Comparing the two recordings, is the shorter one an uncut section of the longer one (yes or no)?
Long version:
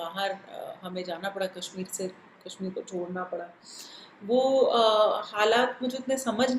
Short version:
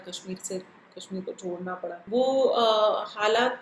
no